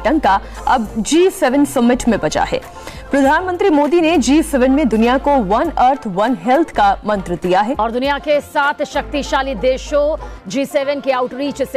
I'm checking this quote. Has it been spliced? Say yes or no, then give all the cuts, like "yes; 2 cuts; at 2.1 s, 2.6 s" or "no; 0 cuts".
no; 0 cuts